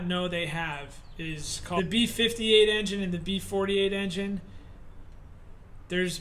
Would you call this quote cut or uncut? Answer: cut